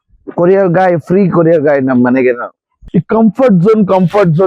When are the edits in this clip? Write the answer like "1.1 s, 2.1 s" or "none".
2.8 s